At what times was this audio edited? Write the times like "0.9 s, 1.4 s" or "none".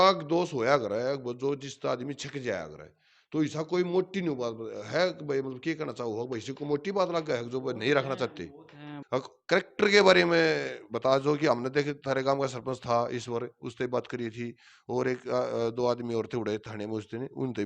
9.0 s